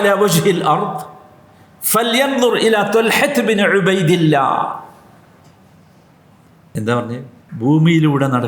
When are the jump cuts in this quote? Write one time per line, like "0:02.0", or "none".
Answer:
0:06.8
0:07.4